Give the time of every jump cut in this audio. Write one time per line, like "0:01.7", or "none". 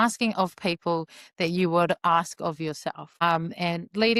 none